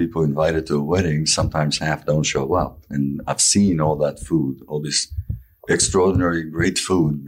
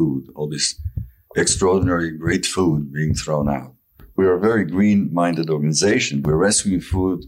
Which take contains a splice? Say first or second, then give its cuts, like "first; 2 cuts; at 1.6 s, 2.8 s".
second; 1 cut; at 4.1 s